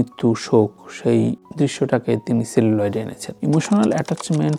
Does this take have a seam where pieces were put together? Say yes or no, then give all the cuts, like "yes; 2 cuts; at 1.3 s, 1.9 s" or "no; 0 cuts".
no; 0 cuts